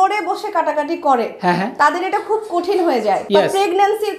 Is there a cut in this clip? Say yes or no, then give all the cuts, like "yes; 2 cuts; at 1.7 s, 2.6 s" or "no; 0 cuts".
yes; 2 cuts; at 1.7 s, 3.2 s